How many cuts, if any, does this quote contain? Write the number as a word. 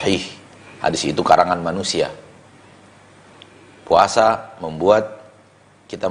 zero